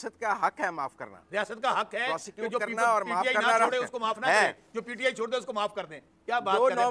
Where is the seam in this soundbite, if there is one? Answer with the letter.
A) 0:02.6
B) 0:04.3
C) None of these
C